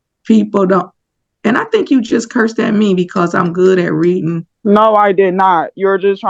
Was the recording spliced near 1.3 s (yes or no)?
no